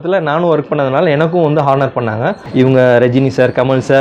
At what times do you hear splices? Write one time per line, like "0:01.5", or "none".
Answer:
0:02.4